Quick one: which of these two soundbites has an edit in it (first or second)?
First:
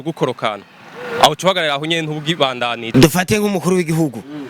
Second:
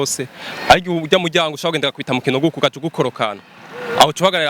first